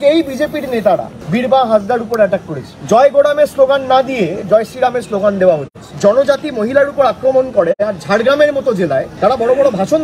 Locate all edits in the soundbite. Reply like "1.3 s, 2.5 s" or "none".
2.7 s, 5.9 s